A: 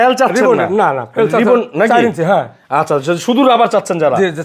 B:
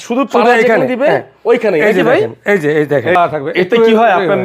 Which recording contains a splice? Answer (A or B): B